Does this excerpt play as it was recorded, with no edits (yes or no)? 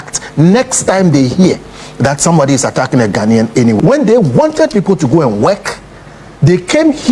no